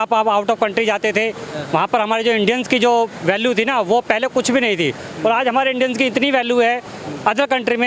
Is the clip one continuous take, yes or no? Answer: yes